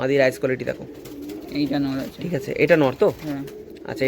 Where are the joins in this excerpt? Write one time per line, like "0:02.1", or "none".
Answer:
none

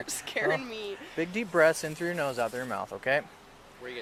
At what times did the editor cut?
none

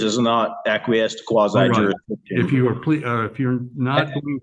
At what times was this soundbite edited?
none

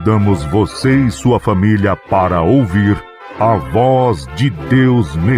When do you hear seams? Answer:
none

